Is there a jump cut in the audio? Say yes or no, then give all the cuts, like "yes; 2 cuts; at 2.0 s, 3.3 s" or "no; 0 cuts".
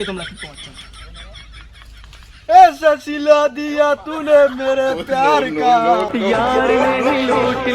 no; 0 cuts